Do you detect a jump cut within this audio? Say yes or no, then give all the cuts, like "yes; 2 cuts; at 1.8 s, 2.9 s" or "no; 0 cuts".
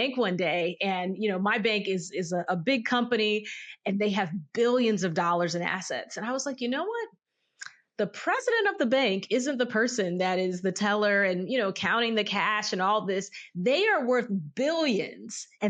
no; 0 cuts